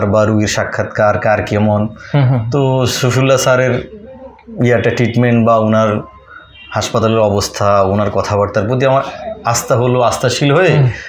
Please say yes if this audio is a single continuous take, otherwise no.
yes